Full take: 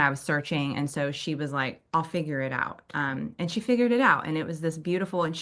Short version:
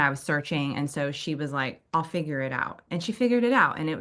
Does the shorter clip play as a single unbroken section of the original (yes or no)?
no